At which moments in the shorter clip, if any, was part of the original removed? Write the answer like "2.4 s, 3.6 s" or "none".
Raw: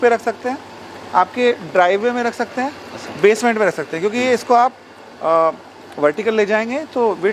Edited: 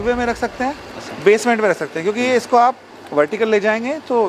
2.9 s